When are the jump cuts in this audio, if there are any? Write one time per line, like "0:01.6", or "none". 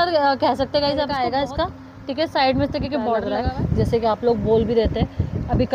0:01.1
0:03.3